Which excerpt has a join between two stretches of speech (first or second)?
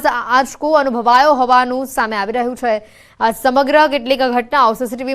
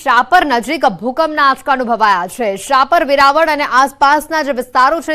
first